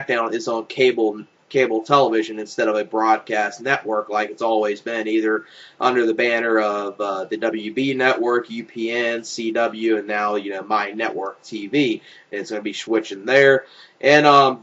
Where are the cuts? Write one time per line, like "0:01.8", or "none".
none